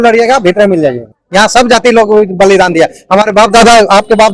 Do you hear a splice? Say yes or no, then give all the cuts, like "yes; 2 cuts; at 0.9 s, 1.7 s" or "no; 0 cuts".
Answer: yes; 1 cut; at 1.0 s